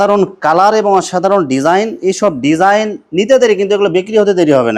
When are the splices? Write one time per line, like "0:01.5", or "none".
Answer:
none